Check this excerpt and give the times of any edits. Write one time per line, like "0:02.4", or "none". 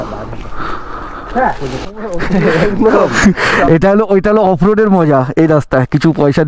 0:01.9